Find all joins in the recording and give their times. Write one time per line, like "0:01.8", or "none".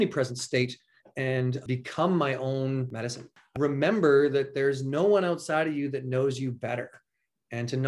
0:01.6
0:03.5